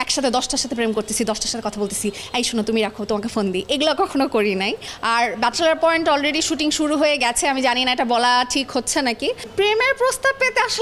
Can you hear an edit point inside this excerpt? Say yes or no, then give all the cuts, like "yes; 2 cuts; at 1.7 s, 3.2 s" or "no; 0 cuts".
yes; 2 cuts; at 4.9 s, 9.4 s